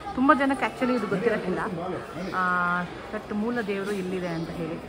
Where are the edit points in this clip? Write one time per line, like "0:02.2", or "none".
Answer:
none